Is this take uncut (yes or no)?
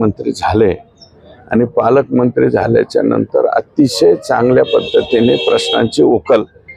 yes